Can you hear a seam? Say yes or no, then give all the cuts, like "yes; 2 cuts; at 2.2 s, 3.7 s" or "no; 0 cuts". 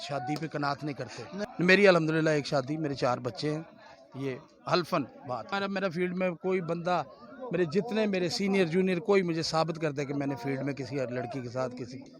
yes; 2 cuts; at 1.4 s, 5.5 s